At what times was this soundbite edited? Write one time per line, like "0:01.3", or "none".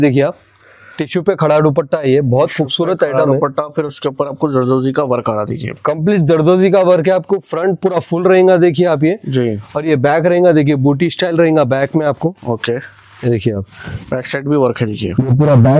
none

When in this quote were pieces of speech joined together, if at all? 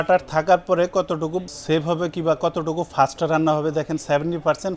0:01.5

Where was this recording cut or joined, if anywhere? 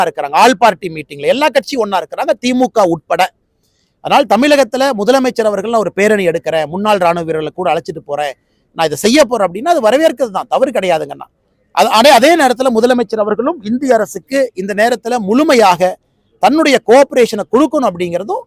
none

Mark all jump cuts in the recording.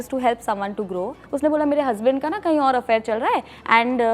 0:01.2

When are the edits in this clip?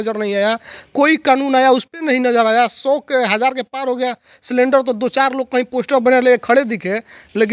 none

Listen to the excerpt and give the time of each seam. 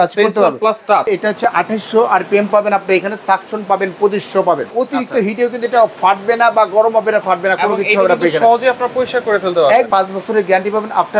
0:01.1
0:04.7
0:09.9

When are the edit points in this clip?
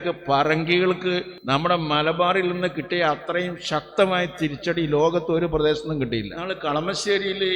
0:01.3
0:06.4

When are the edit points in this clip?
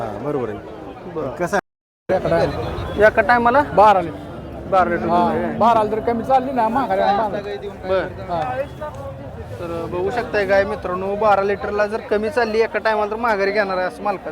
0:01.6

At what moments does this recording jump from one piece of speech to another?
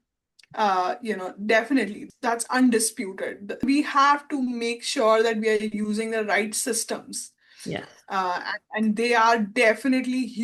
0:02.0
0:03.7

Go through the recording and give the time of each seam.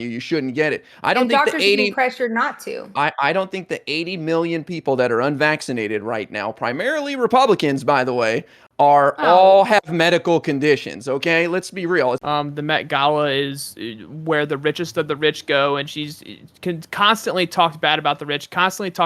0:12.2

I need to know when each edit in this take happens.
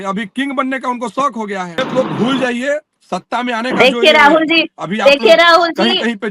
0:01.8

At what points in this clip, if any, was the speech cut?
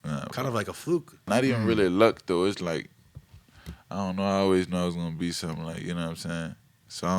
0:01.2

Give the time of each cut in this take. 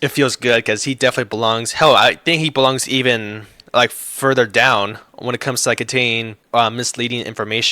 0:06.3

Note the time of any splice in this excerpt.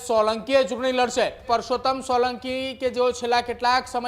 0:01.4

